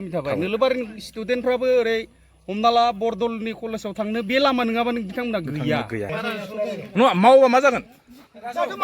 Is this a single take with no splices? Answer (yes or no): no